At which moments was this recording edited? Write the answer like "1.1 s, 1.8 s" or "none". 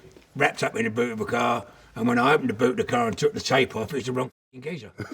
1.8 s

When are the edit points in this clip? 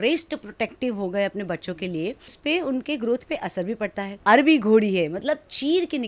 2.4 s, 4.1 s

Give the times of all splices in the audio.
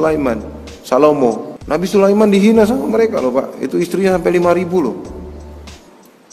1.5 s

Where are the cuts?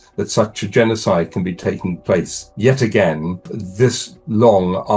2.4 s, 3.8 s

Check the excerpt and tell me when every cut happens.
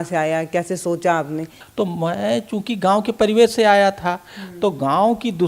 1.6 s

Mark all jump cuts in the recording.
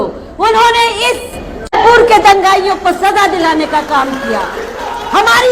1.8 s

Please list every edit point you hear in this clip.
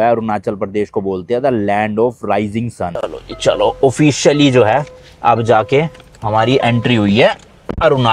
3.0 s

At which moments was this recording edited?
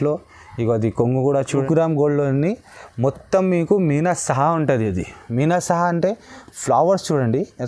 1.6 s

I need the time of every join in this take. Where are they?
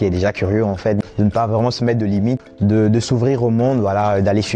1.0 s, 2.4 s

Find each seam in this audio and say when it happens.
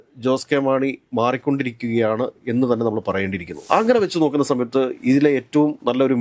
3.7 s

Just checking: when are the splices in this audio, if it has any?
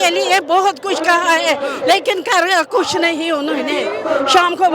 3.8 s

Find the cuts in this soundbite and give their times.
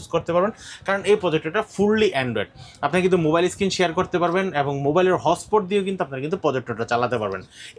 none

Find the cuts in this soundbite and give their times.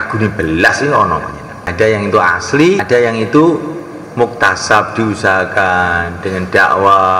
1.7 s, 2.8 s

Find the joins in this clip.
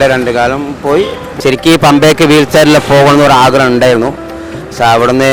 1.4 s

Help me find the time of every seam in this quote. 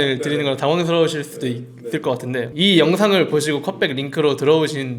2.5 s

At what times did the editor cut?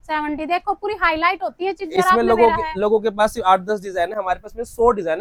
none

